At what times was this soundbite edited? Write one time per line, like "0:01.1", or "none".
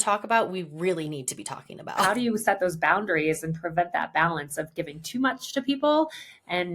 0:02.0